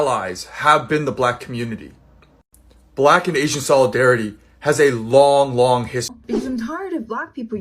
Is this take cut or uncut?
cut